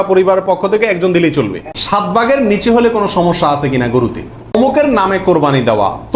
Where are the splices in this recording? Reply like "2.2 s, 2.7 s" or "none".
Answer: 1.8 s, 4.6 s